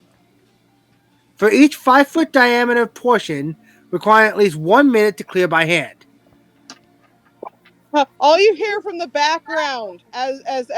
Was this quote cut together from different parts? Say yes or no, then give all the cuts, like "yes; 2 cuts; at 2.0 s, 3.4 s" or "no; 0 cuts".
no; 0 cuts